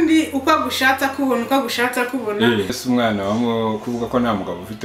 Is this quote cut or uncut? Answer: cut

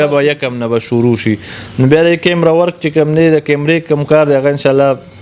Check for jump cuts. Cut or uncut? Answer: uncut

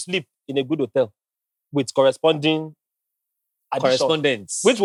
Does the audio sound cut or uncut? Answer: uncut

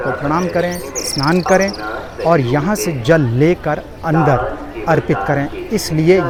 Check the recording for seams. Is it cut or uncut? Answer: uncut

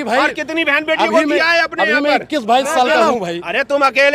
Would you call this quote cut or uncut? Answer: cut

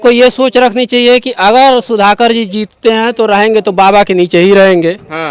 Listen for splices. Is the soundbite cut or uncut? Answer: uncut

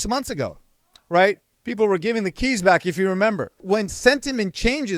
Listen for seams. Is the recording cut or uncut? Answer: cut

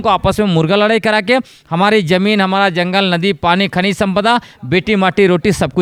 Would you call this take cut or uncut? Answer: uncut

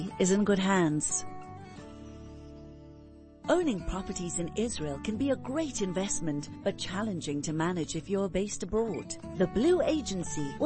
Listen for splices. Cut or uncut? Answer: cut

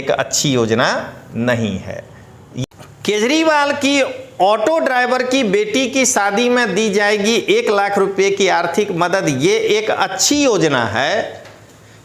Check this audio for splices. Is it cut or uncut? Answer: cut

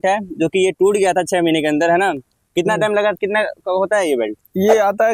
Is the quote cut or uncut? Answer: uncut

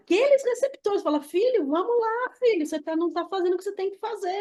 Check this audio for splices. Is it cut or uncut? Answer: uncut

